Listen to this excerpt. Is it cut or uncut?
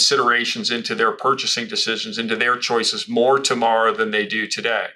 uncut